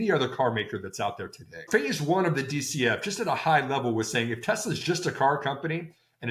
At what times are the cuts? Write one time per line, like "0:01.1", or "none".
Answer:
0:01.7